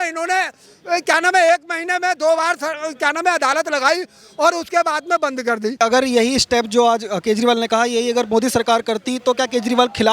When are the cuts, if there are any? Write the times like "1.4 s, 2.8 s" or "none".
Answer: 5.8 s